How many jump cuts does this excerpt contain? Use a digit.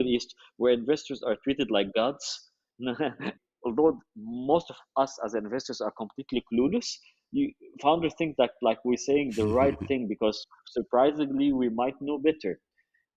1